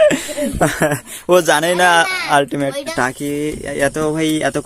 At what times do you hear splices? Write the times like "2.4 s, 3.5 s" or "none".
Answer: 2.9 s